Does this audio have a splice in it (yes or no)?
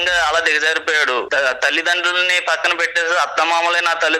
yes